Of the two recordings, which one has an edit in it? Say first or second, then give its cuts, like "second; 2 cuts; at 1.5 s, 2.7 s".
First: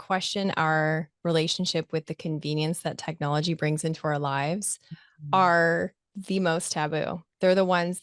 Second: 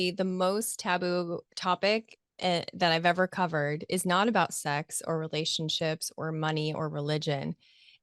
first; 1 cut; at 6.1 s